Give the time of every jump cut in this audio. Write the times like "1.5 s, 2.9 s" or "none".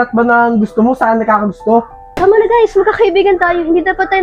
2.0 s